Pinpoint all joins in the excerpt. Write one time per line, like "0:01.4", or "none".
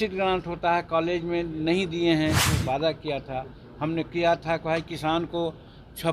0:02.5